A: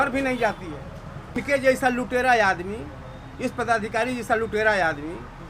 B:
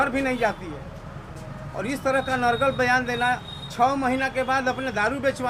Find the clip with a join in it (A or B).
A